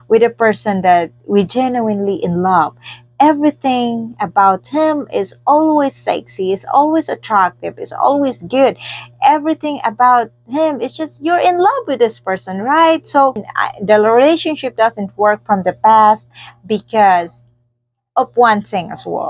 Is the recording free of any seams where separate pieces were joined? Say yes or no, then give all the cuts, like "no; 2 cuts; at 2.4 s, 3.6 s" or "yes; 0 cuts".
no; 1 cut; at 13.5 s